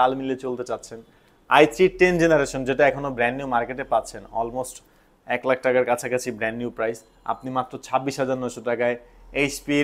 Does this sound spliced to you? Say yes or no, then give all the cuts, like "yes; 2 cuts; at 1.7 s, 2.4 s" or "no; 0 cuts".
no; 0 cuts